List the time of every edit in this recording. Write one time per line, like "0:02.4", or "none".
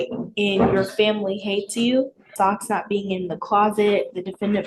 0:02.3